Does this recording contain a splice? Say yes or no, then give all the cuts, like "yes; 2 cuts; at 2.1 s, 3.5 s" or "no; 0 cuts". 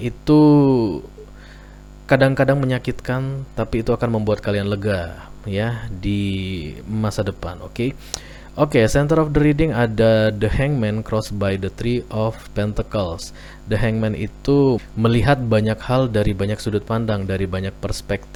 no; 0 cuts